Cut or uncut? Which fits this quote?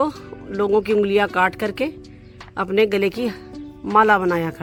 uncut